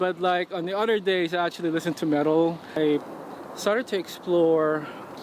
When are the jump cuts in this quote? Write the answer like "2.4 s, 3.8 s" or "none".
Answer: 2.8 s